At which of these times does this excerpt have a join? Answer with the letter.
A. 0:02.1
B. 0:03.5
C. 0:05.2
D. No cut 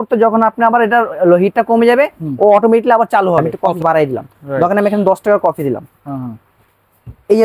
B